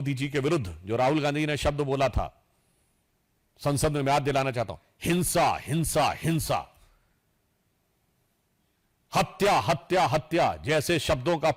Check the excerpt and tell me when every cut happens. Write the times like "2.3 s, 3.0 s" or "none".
none